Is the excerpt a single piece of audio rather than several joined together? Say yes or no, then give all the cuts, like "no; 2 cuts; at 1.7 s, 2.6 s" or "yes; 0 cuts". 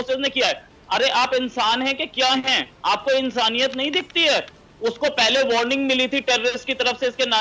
yes; 0 cuts